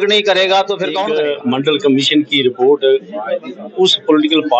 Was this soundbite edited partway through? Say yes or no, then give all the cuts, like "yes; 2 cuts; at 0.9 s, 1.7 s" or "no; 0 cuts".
yes; 1 cut; at 1.0 s